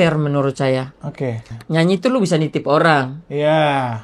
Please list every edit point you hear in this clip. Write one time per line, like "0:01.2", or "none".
0:01.5